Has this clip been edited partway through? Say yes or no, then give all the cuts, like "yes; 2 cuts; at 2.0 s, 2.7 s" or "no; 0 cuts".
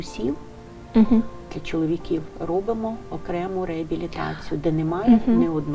no; 0 cuts